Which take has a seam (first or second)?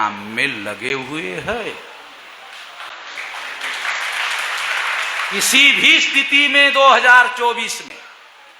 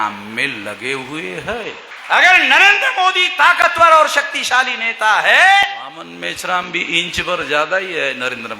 second